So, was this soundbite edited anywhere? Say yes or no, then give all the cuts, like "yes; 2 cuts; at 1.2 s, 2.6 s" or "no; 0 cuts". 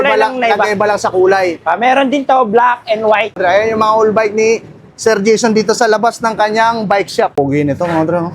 yes; 2 cuts; at 3.4 s, 7.4 s